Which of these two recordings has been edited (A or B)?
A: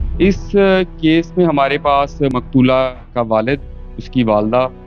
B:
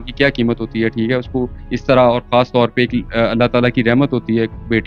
A